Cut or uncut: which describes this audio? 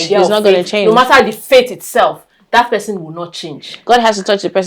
uncut